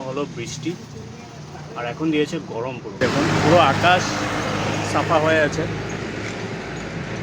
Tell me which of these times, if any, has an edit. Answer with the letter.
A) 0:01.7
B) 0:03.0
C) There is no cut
B